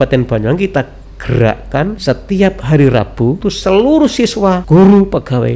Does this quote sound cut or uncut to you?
cut